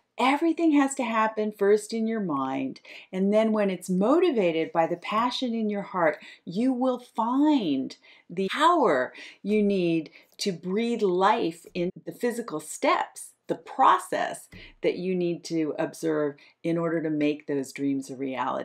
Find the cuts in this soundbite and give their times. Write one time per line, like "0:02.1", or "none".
0:08.5
0:12.0

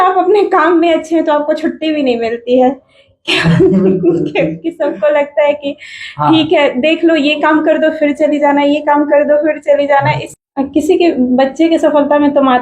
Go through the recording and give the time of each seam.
0:10.3

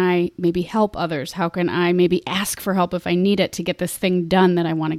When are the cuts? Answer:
none

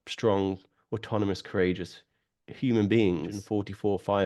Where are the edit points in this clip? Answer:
0:03.4

